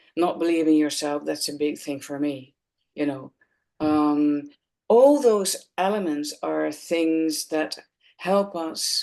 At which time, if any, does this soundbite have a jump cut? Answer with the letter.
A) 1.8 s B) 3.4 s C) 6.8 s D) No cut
D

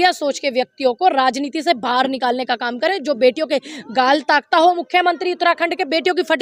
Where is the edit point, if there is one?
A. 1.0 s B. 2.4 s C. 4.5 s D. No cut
D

